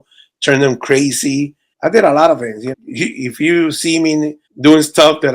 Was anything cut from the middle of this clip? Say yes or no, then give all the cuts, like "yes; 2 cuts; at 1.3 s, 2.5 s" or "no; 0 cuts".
yes; 2 cuts; at 1.6 s, 2.7 s